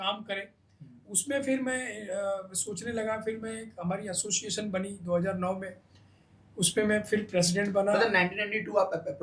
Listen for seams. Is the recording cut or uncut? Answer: uncut